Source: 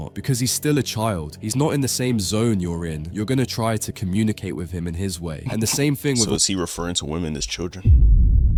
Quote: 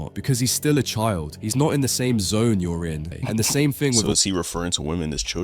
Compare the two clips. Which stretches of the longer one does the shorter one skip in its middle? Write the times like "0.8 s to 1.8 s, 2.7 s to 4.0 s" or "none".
3.1 s to 5.3 s